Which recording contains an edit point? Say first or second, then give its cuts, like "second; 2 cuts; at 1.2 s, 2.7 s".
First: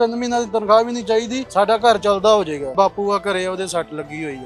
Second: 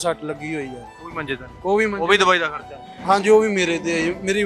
first; 2 cuts; at 1.4 s, 2.7 s